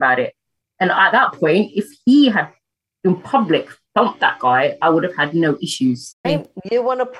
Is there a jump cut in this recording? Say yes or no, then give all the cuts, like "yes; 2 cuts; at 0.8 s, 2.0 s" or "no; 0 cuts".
yes; 1 cut; at 6.2 s